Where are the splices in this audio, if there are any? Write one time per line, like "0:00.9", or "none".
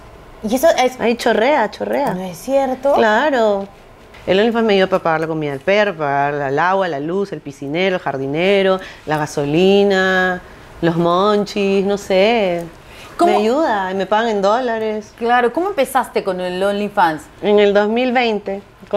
none